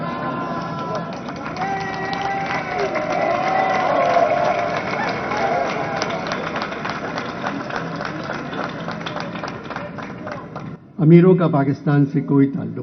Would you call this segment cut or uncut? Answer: uncut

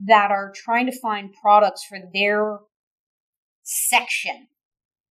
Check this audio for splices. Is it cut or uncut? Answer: uncut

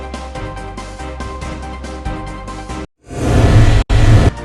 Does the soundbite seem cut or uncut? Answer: cut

